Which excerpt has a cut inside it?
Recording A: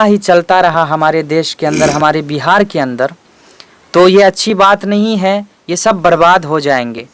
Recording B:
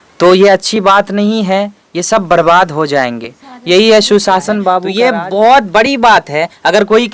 B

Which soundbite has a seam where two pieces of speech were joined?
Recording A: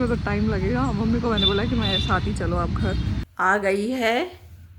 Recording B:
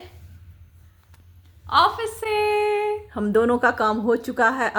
A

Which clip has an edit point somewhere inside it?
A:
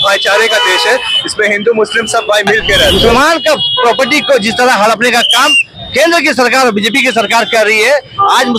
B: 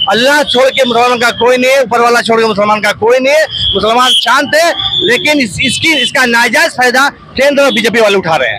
A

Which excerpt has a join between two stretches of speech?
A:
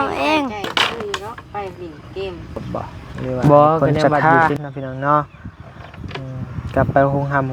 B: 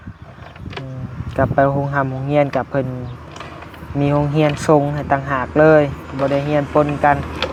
A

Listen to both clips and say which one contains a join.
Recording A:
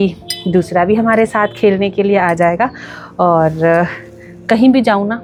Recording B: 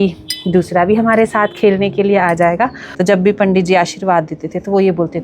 B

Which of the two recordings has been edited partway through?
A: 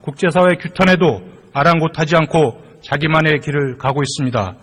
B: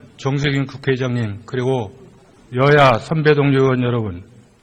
A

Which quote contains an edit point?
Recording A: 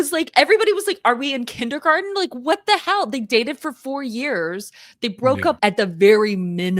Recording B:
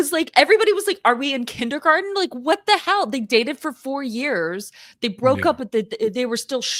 A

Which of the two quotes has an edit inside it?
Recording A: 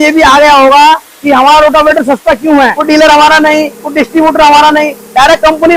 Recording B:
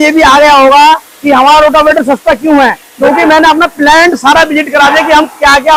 A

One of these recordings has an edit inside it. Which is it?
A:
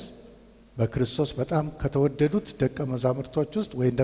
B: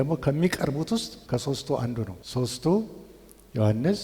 B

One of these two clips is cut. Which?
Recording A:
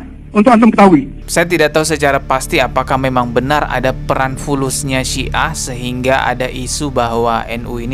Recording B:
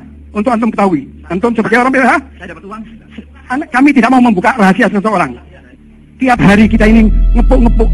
A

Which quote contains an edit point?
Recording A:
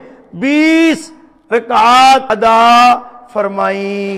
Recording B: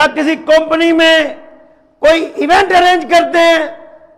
A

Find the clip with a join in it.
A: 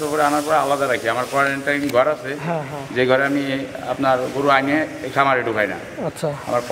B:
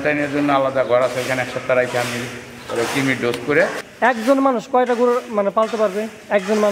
B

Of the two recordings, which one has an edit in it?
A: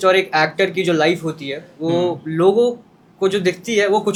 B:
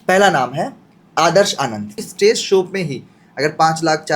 B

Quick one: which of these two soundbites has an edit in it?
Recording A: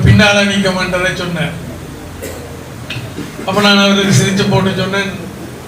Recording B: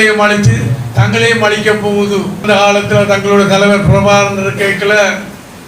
B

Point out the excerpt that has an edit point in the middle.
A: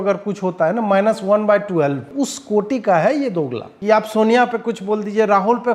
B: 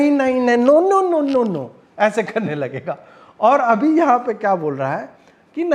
A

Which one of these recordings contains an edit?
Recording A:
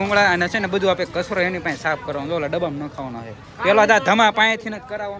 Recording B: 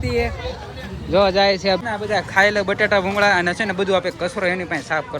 B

